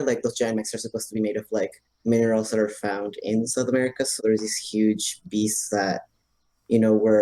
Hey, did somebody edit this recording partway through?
yes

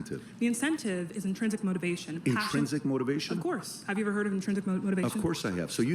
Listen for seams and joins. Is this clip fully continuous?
no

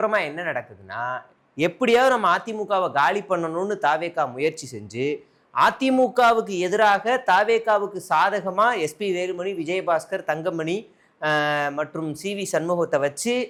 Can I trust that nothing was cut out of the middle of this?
yes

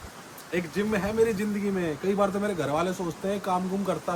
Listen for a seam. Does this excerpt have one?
no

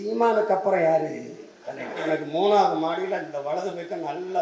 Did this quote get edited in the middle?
yes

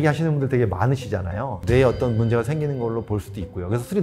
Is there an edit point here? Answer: yes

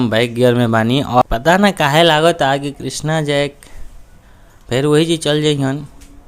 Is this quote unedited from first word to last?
no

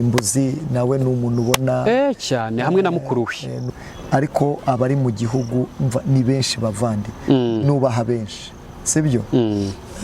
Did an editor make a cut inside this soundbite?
yes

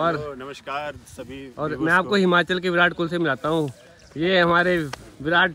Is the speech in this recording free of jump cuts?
yes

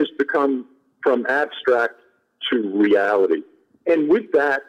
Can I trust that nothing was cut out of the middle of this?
yes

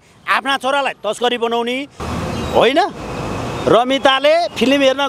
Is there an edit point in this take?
yes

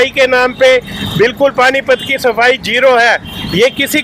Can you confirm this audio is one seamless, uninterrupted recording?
yes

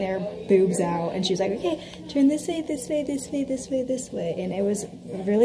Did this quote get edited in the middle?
no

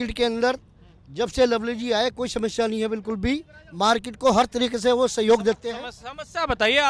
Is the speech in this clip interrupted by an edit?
no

